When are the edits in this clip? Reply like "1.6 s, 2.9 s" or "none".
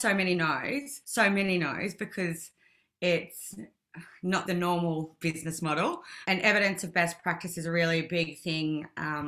1.0 s, 4.4 s